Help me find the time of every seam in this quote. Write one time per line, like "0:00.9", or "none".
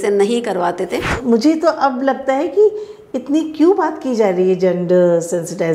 0:01.1

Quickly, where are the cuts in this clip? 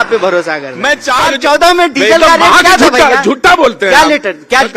0:01.2

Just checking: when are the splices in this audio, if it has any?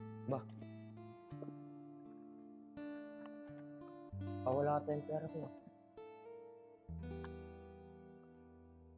0:04.4
0:05.5

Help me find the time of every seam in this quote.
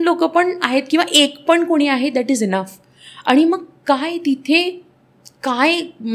none

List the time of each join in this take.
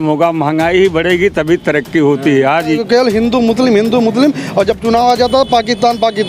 0:02.6

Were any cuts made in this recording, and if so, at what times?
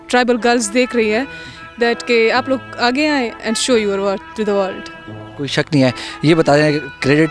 none

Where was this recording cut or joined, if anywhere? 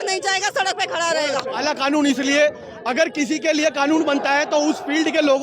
0:01.5

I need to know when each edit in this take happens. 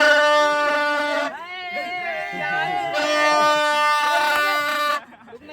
0:03.6

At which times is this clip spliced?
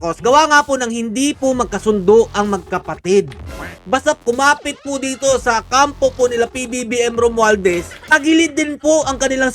0:03.8

